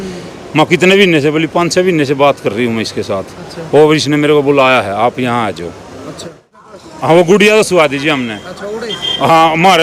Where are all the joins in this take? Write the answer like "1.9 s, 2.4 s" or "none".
6.5 s